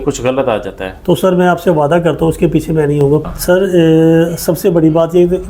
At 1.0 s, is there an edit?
no; 1 cut; at 3.2 s

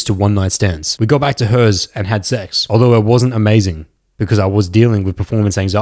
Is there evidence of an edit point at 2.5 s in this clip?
yes; 2 cuts; at 0.8 s, 2.5 s

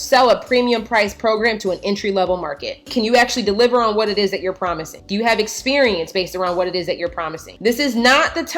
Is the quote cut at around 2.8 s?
yes; 1 cut; at 2.8 s

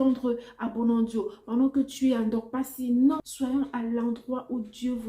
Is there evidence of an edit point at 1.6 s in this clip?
no; 1 cut; at 3.2 s

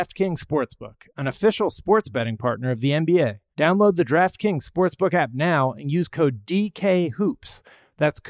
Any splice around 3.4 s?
yes; 1 cut; at 3.4 s

